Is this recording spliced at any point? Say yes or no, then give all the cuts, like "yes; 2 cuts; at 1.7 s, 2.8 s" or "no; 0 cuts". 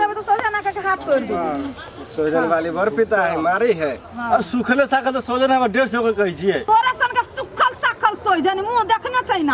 no; 0 cuts